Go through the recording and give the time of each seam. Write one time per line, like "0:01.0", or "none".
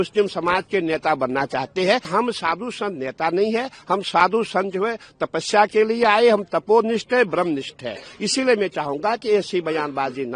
0:02.1